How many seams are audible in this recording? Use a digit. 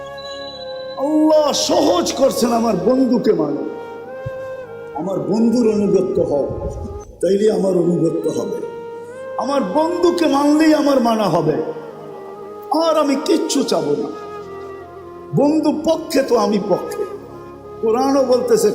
2